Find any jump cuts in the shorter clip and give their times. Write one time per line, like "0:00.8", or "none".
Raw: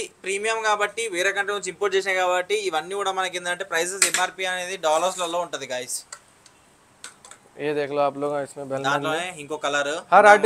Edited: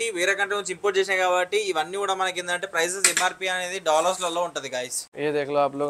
0:05.0

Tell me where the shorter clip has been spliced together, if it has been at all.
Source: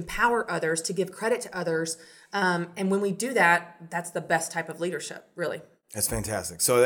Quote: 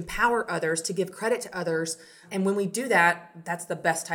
0:02.2

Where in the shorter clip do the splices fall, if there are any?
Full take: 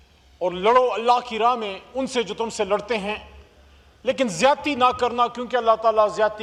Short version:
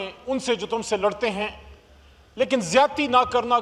none

